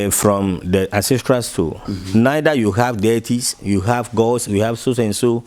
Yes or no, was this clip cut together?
no